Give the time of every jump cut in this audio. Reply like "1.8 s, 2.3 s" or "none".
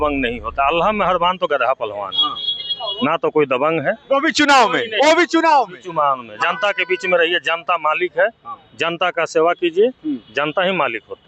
none